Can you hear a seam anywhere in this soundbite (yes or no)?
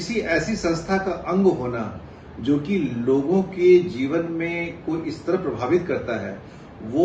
no